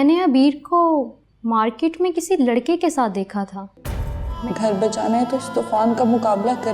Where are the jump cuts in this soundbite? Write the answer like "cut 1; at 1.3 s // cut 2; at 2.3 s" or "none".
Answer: cut 1; at 4.2 s